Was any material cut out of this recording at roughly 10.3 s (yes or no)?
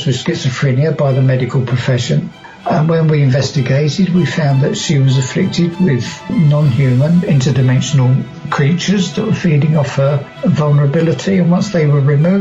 yes